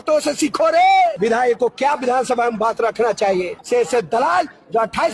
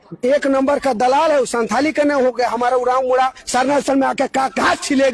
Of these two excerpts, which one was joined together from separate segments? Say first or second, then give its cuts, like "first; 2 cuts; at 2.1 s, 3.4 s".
first; 2 cuts; at 1.2 s, 3.6 s